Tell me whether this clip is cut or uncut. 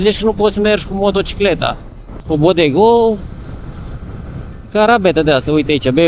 cut